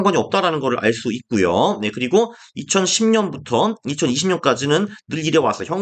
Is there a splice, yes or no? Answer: no